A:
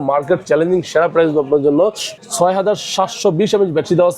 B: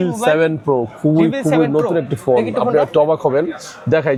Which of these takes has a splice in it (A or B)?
A